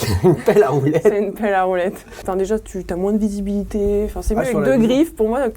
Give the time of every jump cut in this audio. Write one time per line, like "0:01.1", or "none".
0:02.2